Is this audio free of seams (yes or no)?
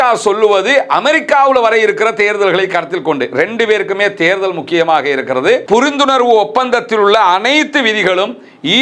no